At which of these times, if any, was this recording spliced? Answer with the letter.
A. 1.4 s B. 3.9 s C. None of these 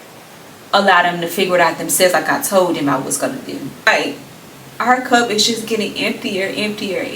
B